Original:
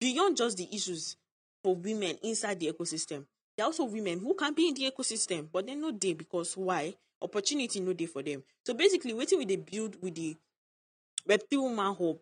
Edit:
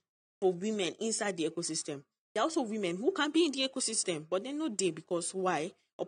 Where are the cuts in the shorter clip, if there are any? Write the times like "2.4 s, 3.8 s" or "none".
none